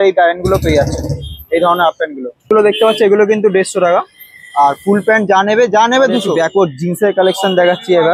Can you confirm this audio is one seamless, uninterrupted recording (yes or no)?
no